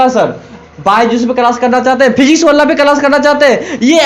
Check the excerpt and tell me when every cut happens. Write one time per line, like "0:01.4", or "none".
none